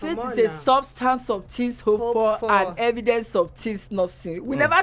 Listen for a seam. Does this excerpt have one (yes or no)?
no